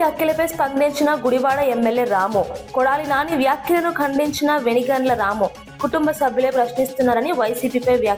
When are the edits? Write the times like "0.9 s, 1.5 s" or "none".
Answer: none